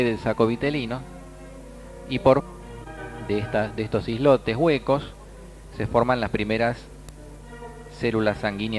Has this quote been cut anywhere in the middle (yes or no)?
no